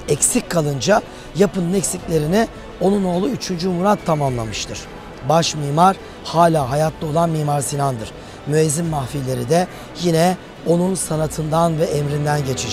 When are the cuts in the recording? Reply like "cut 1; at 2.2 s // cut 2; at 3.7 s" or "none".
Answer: none